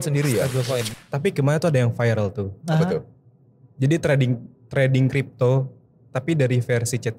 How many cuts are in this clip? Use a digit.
1